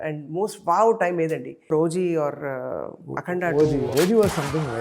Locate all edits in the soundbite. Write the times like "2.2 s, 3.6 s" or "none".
1.7 s, 3.9 s